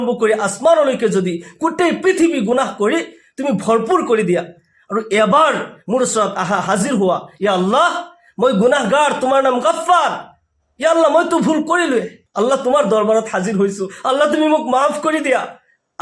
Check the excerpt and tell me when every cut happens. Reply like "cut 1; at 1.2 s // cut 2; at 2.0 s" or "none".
cut 1; at 12.2 s